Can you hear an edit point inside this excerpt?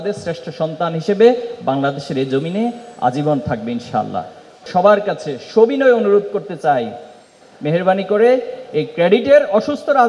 yes; 1 cut; at 4.7 s

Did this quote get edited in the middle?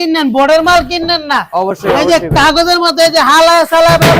no; 0 cuts

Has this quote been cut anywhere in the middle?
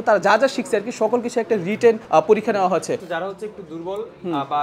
yes; 1 cut; at 3.0 s

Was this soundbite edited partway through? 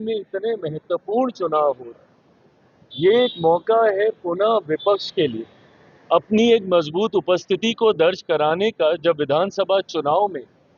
no; 0 cuts

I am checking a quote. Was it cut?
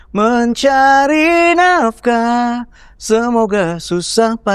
no; 0 cuts

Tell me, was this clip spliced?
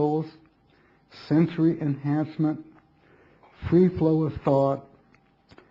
yes; 1 cut; at 1.8 s

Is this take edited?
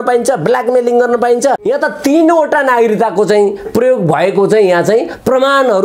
yes; 1 cut; at 1.6 s

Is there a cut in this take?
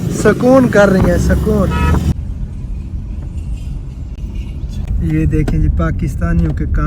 yes; 2 cuts; at 2.1 s, 4.8 s

